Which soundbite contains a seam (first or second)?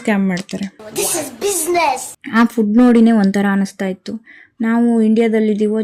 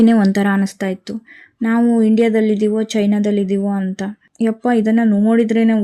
first